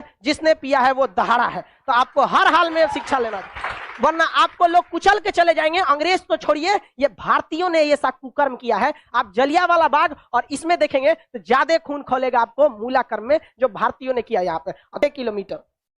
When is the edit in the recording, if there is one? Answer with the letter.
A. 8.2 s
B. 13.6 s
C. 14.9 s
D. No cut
C